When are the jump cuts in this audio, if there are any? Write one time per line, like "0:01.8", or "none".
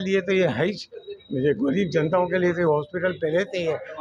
none